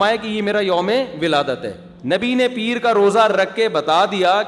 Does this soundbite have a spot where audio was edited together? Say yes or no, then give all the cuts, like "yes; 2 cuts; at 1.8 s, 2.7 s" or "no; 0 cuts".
yes; 1 cut; at 1.9 s